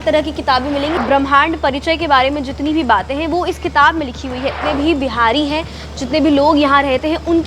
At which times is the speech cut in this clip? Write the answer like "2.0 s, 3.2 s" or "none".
1.0 s, 4.6 s

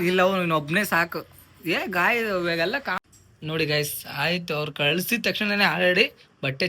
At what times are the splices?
3.0 s

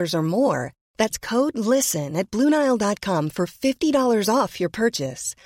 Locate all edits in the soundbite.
none

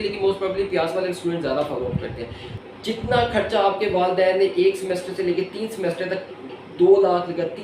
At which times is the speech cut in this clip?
2.5 s

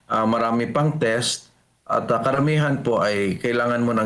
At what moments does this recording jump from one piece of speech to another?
none

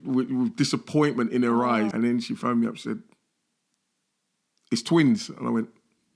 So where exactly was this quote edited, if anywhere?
1.9 s

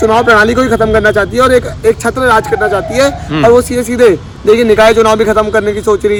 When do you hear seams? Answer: none

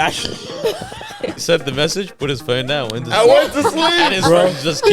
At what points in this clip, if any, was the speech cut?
1.4 s

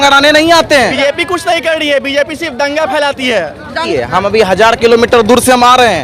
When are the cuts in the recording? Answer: 0.9 s, 3.9 s

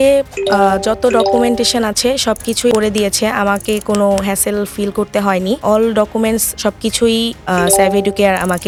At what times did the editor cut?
none

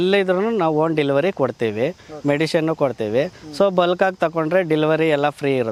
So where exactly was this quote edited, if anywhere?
none

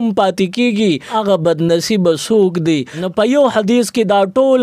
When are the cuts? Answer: 1.1 s, 3.0 s

